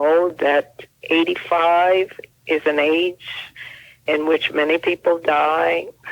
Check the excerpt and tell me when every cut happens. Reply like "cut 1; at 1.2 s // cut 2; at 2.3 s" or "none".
cut 1; at 2.2 s